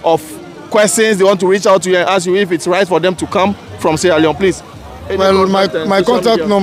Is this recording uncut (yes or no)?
yes